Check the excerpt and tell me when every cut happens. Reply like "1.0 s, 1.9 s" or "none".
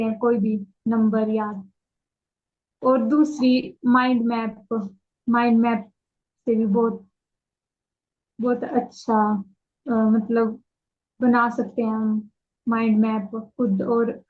none